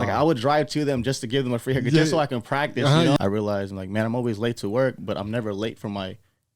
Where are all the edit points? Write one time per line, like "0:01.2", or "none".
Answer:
0:03.2